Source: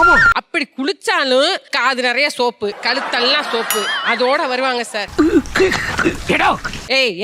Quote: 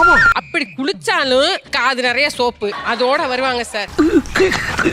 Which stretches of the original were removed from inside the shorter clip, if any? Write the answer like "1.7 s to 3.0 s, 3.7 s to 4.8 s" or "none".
2.8 s to 4.0 s